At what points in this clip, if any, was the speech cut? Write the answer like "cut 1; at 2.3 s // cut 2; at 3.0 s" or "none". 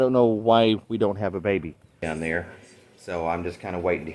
cut 1; at 2.0 s